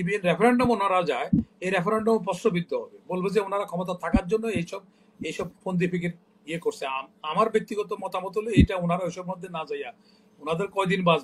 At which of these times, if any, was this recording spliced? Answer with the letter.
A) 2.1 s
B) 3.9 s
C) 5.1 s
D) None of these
D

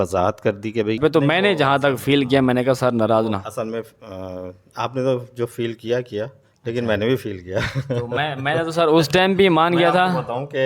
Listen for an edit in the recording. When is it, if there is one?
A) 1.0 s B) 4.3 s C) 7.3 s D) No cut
A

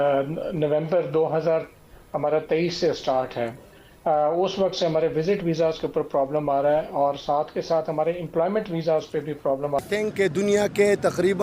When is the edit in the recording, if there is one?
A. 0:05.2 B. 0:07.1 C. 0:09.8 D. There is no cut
C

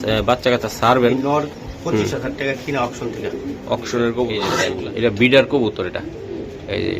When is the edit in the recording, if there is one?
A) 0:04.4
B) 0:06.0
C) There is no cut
A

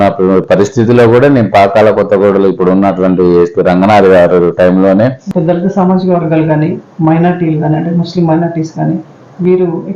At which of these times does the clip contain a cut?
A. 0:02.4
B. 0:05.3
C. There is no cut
B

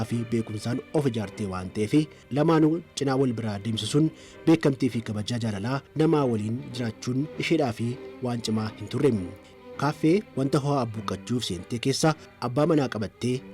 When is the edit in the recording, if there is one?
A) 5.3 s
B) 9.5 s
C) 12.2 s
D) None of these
B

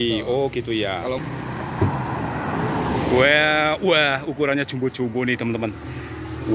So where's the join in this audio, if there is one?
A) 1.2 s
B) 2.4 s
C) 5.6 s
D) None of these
A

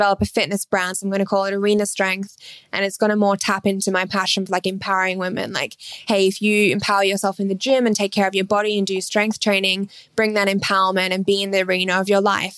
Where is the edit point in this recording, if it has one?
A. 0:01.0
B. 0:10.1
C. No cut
A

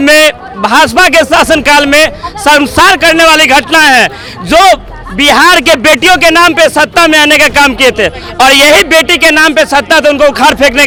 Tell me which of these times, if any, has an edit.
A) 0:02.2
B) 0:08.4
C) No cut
C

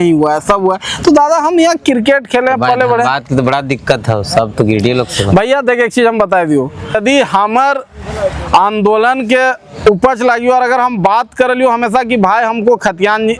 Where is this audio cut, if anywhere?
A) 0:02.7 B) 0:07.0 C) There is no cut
B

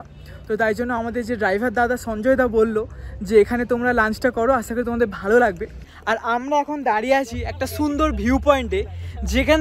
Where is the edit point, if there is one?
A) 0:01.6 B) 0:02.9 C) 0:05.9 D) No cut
C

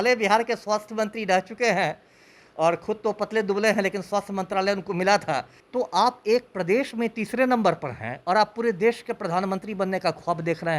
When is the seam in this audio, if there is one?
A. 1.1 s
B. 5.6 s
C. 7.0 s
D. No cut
B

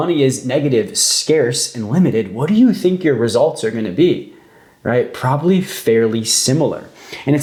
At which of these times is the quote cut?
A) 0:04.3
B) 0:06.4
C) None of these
C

